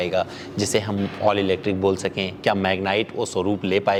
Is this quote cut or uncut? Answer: uncut